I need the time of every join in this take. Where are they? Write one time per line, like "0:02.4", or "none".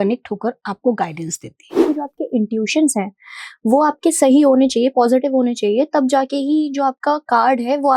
0:01.8